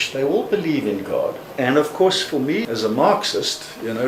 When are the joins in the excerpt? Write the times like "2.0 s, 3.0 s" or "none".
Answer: 1.4 s, 2.6 s